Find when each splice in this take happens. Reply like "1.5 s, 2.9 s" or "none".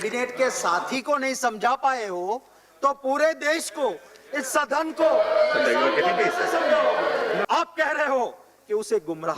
7.4 s